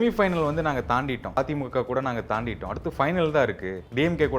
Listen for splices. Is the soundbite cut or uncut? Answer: cut